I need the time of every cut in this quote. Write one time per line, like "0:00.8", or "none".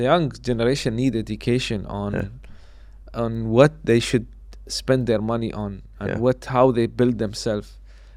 none